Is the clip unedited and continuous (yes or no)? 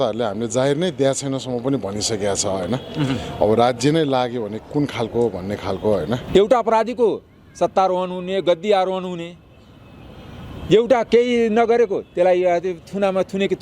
no